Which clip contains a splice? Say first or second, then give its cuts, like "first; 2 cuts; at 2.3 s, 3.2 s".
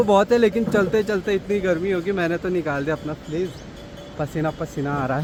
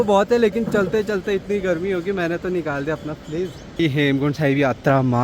second; 1 cut; at 3.8 s